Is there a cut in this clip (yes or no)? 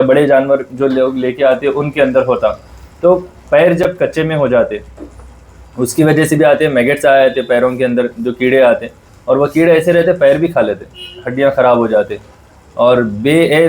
no